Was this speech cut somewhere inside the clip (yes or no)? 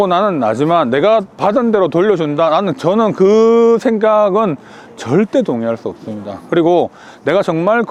no